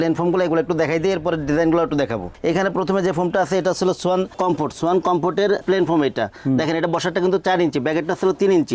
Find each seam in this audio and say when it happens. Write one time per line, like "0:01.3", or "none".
none